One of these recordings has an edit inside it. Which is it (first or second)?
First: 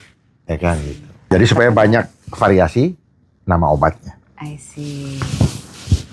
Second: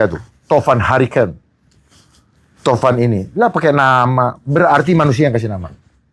first